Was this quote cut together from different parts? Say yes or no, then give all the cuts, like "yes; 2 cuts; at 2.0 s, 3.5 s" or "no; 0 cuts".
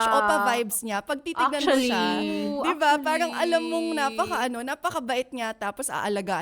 no; 0 cuts